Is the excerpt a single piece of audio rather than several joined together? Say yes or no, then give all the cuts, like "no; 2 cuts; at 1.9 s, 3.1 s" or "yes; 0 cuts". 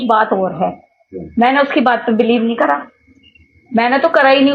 yes; 0 cuts